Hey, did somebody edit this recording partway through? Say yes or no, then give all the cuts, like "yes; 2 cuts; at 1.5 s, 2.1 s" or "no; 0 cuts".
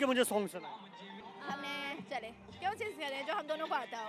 no; 0 cuts